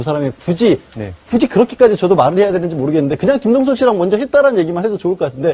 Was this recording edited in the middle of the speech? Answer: yes; 1 cut; at 4.0 s

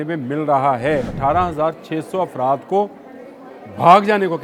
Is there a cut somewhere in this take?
yes; 1 cut; at 1.1 s

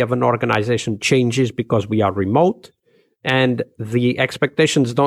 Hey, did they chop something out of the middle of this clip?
no; 0 cuts

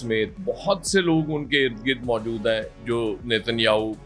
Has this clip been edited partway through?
no; 0 cuts

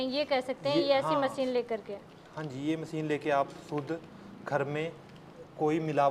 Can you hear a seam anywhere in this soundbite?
no; 0 cuts

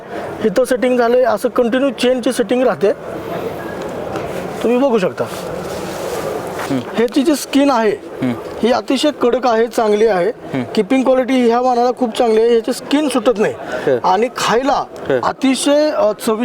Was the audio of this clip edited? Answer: yes; 1 cut; at 6.6 s

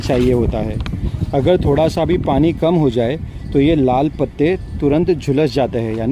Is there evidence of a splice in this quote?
no; 0 cuts

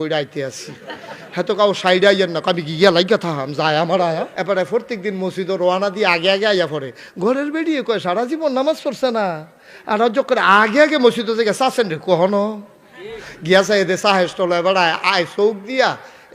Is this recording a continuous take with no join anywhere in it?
no; 1 cut; at 4.3 s

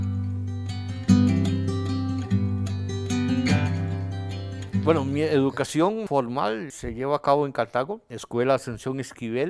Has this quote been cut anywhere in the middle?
yes; 1 cut; at 1.8 s

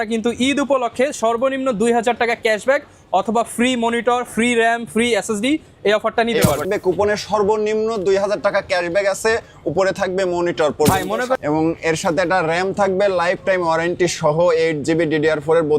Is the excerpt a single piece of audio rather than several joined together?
no; 2 cuts; at 6.6 s, 11.4 s

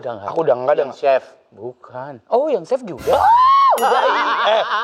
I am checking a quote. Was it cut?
no; 0 cuts

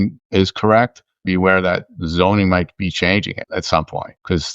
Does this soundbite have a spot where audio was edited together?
yes; 1 cut; at 1.2 s

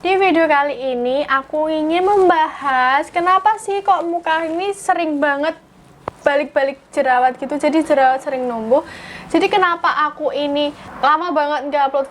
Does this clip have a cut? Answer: yes; 1 cut; at 10.8 s

